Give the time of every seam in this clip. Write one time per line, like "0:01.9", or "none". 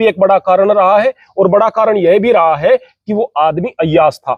none